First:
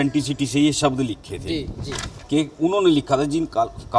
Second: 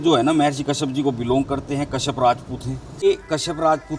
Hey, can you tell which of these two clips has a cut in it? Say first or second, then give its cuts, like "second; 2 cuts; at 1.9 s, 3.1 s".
second; 1 cut; at 3.0 s